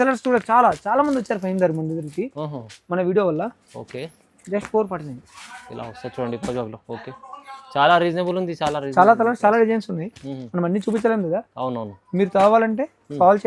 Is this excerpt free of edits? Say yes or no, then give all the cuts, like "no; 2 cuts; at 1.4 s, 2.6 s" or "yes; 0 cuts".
yes; 0 cuts